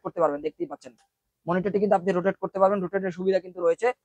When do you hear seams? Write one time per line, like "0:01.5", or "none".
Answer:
none